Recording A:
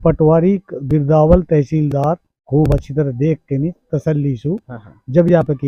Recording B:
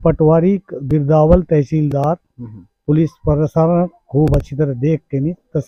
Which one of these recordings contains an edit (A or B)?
A